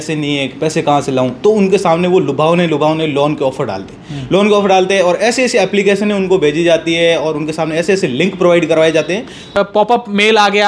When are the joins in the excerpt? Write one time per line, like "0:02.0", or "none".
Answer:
0:09.6